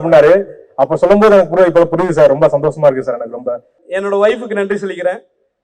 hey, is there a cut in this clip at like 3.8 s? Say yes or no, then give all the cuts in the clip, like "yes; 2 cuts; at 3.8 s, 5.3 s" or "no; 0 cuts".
yes; 1 cut; at 3.8 s